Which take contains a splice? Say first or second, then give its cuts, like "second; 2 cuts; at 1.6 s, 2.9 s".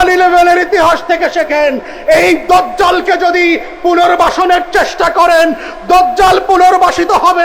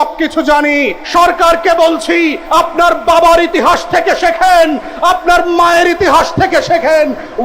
second; 2 cuts; at 1.0 s, 2.4 s